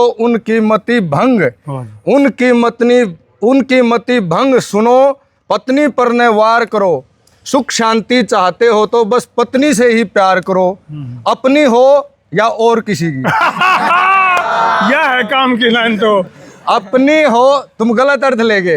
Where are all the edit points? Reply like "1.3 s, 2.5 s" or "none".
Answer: none